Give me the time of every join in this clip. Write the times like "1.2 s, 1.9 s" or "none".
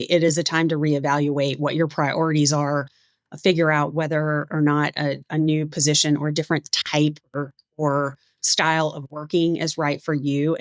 none